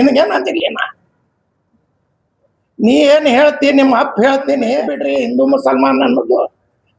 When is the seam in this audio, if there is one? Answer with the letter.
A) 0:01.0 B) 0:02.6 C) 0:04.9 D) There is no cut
C